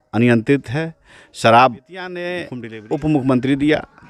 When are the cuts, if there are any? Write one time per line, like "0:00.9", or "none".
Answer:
0:02.4